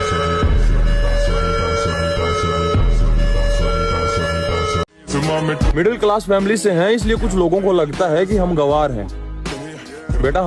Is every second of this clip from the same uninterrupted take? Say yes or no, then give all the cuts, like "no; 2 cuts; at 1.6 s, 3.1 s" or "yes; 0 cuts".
no; 1 cut; at 4.9 s